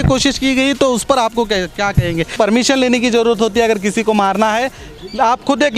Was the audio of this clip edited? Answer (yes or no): yes